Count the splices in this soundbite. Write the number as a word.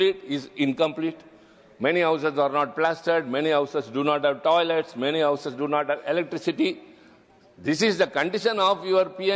zero